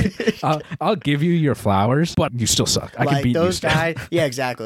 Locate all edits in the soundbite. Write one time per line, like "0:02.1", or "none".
0:02.3